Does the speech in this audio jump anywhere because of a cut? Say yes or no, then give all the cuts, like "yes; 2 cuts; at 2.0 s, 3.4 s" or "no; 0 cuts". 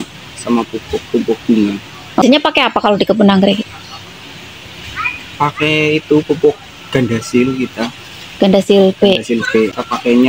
yes; 1 cut; at 2.2 s